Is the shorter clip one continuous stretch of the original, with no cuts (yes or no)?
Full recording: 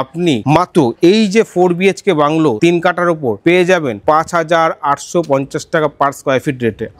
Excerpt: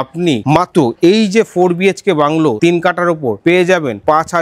yes